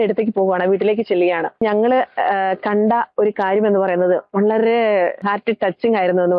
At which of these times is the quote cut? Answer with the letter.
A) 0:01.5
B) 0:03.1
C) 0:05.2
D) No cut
C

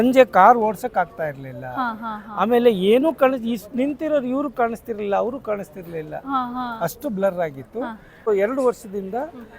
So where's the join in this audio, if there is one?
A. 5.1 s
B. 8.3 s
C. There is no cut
B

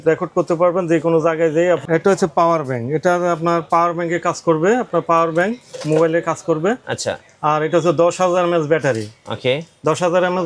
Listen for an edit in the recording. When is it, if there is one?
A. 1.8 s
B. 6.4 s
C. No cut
A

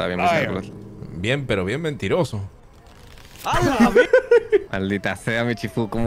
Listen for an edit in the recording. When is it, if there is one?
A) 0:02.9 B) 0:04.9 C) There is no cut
B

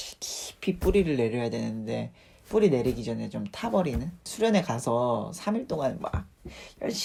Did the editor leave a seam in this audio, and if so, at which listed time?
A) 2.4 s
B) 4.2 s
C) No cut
C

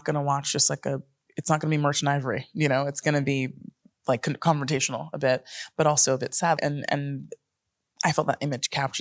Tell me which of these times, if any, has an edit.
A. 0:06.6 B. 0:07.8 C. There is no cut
A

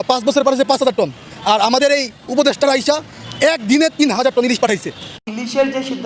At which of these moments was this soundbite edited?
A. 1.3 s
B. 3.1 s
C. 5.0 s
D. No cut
C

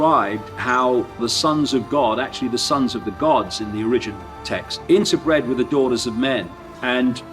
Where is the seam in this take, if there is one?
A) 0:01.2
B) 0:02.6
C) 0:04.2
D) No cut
A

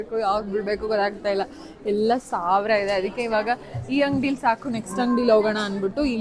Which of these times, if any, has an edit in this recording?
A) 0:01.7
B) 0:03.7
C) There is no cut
C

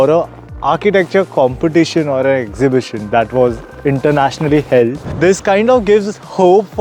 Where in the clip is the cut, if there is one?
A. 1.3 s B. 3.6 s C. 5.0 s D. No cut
C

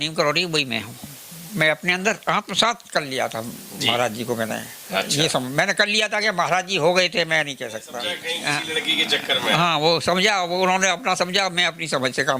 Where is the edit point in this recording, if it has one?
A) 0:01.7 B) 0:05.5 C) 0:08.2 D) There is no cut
C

